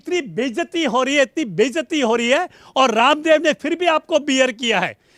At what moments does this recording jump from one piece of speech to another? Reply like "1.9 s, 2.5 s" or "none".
none